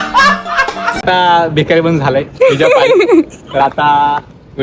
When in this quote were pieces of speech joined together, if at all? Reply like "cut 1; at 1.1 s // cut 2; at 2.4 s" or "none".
cut 1; at 1.0 s